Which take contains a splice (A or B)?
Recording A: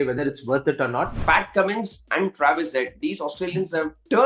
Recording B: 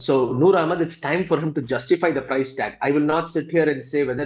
A